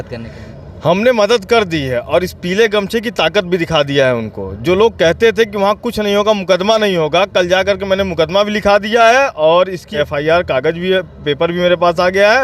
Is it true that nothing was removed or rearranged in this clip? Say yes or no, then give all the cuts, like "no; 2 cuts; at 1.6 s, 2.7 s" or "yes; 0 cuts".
no; 1 cut; at 9.9 s